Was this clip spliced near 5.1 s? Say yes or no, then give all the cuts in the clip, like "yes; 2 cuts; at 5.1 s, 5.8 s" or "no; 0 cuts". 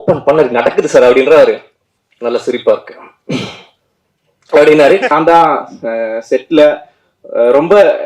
yes; 1 cut; at 5.1 s